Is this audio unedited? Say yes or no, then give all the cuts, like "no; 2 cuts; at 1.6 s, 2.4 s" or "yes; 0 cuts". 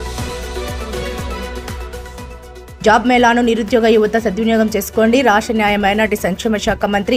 no; 1 cut; at 2.6 s